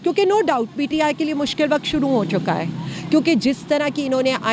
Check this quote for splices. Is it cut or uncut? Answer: uncut